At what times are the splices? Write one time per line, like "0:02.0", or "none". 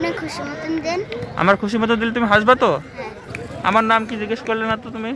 0:03.1